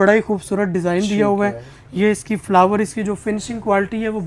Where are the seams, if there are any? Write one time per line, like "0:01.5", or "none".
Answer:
none